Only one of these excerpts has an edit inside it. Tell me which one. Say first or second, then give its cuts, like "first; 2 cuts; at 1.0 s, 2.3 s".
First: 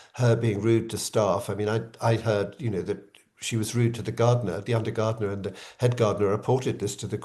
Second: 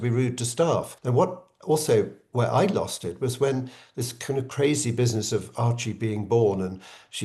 second; 1 cut; at 1.0 s